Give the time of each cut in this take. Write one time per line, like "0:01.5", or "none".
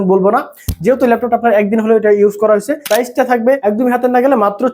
0:02.8
0:03.6